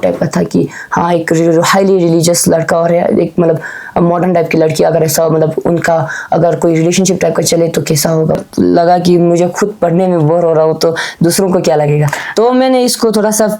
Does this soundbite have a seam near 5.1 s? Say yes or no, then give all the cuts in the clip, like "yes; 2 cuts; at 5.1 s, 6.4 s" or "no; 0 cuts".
no; 1 cut; at 8.4 s